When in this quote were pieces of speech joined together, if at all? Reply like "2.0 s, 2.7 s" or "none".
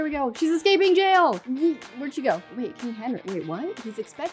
2.5 s

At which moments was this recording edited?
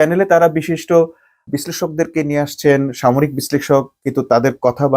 1.4 s

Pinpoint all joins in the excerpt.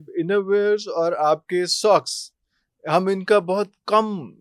none

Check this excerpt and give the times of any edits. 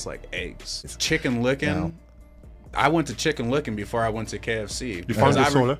0.9 s

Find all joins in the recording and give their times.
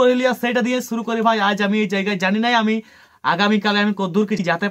none

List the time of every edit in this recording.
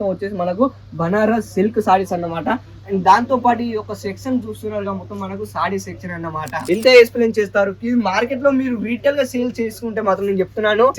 6.5 s

